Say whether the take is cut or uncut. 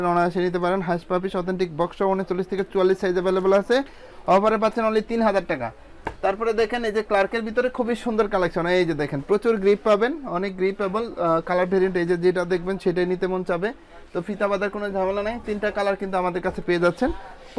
uncut